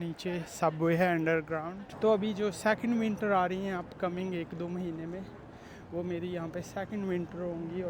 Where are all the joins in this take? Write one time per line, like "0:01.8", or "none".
0:01.8